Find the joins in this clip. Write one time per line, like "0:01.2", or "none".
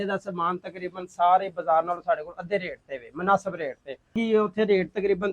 0:04.2